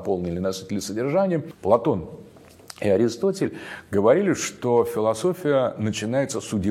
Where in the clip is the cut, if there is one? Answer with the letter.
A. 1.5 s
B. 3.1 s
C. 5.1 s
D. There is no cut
A